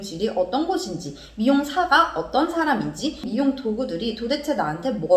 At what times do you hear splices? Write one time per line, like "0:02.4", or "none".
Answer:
0:03.3

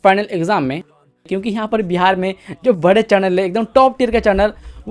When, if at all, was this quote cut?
0:00.9

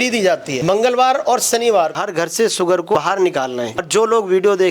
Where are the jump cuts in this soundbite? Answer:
0:01.9

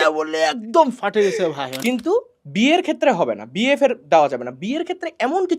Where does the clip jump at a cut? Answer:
0:01.7

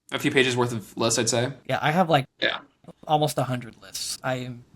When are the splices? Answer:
0:01.6

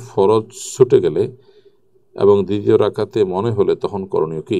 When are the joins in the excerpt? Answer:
none

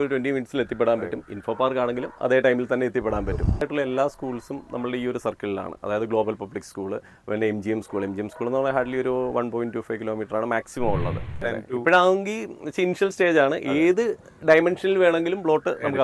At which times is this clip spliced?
0:03.6
0:11.4

